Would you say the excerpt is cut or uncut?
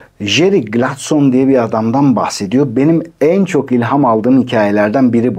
uncut